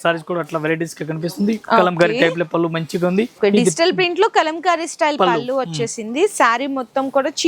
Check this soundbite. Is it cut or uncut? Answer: cut